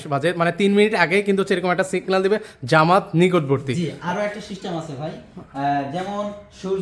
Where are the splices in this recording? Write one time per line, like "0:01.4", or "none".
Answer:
none